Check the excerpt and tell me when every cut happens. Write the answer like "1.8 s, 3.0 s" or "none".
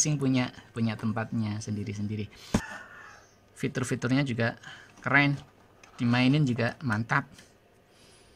2.7 s